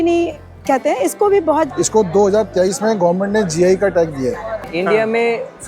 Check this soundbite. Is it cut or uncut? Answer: cut